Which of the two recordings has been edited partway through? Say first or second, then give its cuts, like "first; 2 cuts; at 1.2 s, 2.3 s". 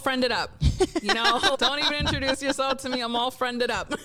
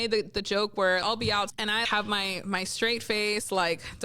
second; 1 cut; at 1.5 s